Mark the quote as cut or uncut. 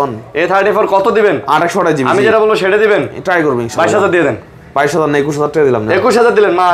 uncut